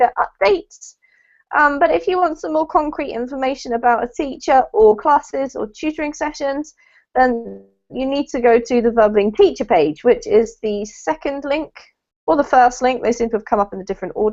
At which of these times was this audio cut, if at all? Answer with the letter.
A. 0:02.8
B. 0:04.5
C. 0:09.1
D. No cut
A